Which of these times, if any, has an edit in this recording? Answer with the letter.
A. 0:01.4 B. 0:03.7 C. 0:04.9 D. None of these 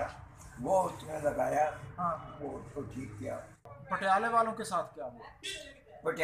B